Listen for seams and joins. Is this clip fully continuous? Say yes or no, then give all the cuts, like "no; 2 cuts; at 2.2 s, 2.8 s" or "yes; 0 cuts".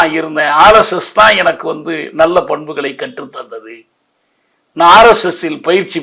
yes; 0 cuts